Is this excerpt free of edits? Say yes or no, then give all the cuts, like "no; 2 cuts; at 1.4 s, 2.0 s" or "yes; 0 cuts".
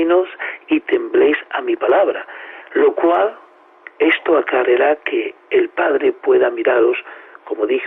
no; 1 cut; at 4.2 s